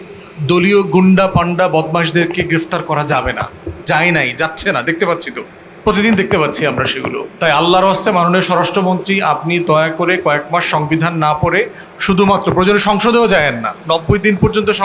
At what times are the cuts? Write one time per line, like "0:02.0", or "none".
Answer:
0:07.2
0:13.7